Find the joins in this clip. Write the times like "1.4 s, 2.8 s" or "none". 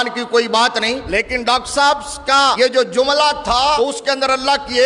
1.0 s, 2.6 s, 3.8 s